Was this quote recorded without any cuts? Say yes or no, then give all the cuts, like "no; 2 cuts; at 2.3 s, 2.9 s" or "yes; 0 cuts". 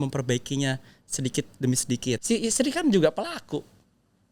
no; 1 cut; at 2.2 s